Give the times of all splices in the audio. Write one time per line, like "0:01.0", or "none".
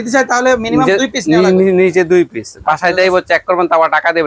none